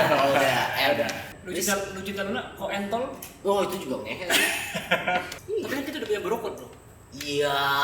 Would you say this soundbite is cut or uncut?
cut